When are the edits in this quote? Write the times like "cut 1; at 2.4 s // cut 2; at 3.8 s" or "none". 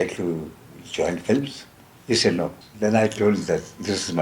cut 1; at 2.6 s

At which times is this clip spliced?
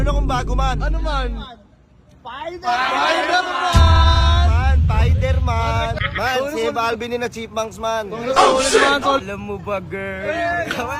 cut 1; at 6.0 s // cut 2; at 9.2 s

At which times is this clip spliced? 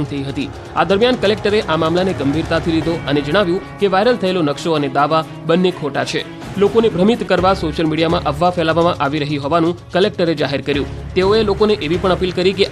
cut 1; at 1.8 s

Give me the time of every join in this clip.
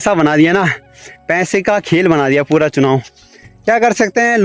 none

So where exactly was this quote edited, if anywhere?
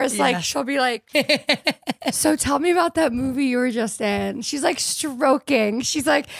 cut 1; at 1.0 s

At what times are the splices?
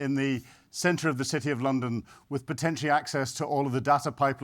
none

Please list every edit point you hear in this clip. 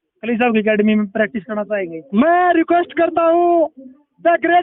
none

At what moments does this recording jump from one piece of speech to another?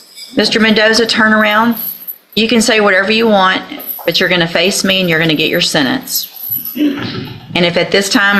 none

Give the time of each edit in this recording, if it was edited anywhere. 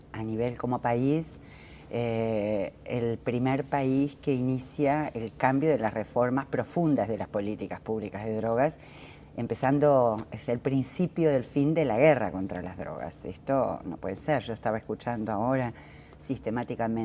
cut 1; at 9.4 s

